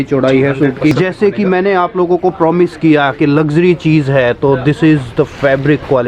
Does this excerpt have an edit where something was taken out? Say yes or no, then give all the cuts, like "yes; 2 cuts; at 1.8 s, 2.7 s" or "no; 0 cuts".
yes; 1 cut; at 0.9 s